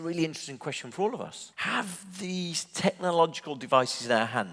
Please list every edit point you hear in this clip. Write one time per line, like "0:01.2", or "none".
0:01.5